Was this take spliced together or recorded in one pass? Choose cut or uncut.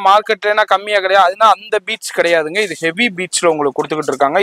uncut